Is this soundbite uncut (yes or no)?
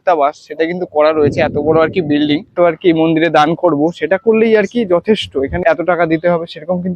no